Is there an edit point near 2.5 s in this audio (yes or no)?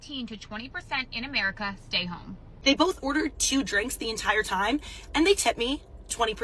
yes